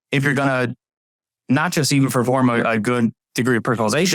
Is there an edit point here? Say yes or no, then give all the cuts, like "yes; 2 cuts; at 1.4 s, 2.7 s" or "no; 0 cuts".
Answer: no; 0 cuts